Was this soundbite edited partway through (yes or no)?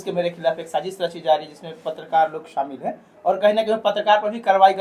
no